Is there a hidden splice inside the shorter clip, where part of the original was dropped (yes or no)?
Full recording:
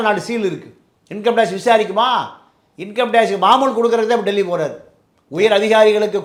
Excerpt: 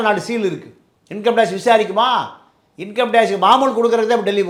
no